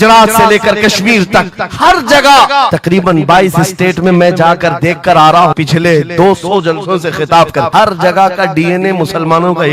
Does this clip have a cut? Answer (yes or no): yes